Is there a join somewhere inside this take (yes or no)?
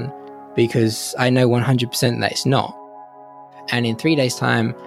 yes